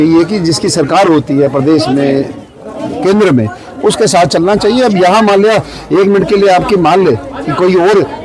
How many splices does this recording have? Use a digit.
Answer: 0